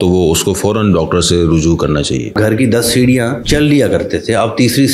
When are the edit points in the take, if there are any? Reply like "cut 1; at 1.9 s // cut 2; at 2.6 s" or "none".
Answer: cut 1; at 2.3 s // cut 2; at 3.4 s